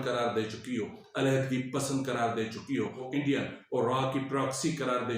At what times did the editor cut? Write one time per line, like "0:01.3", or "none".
0:01.0
0:03.1

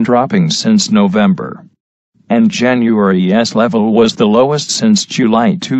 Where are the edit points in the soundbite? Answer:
none

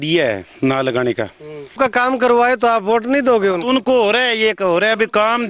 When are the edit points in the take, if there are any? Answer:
0:01.7

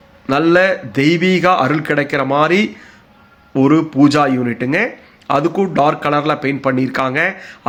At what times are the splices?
none

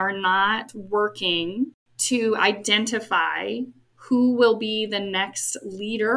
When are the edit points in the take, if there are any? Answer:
0:01.9
0:03.9

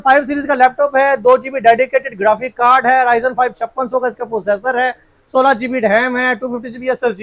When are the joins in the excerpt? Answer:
none

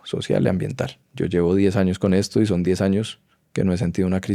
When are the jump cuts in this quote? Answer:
0:01.0

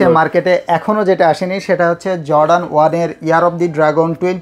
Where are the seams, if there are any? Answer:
none

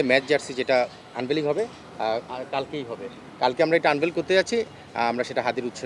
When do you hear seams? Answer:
none

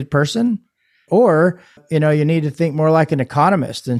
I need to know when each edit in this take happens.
0:01.0
0:01.8

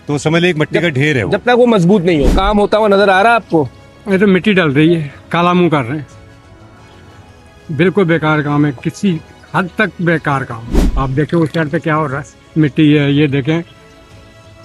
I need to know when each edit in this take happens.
none

